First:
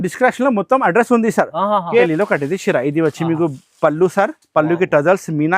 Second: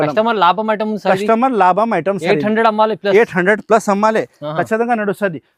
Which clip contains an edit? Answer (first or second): first